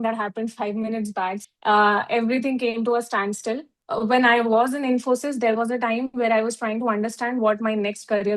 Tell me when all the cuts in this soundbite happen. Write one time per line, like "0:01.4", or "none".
0:01.4
0:03.8